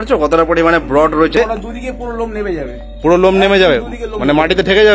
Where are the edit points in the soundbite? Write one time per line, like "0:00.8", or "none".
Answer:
0:01.4